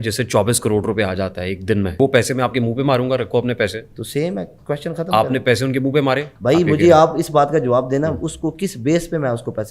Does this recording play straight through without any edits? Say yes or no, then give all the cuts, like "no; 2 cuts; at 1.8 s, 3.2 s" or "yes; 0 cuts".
no; 2 cuts; at 2.0 s, 6.3 s